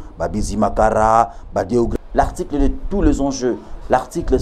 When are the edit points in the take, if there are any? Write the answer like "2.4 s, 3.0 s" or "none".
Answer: 1.9 s